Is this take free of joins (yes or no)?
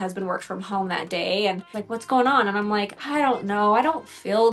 no